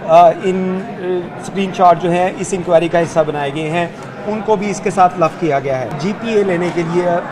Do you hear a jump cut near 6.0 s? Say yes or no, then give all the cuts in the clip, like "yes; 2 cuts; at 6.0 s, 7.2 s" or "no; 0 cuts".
yes; 1 cut; at 6.0 s